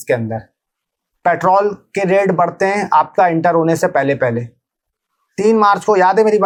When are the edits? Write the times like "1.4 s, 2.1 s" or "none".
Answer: none